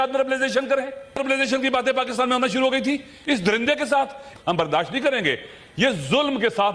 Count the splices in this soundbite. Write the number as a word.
two